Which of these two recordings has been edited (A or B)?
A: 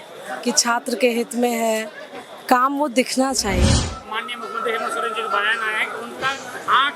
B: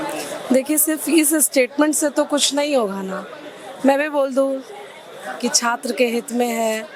A